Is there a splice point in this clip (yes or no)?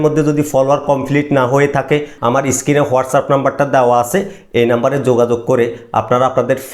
yes